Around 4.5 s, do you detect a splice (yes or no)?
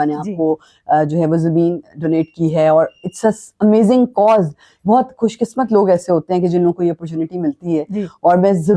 no